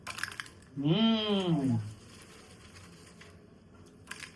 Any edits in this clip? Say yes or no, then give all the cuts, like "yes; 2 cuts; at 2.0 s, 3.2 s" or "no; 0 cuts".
no; 0 cuts